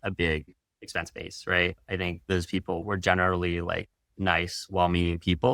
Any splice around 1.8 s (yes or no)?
yes